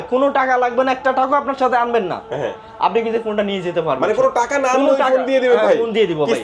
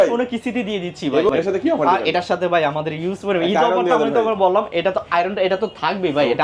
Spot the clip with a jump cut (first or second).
second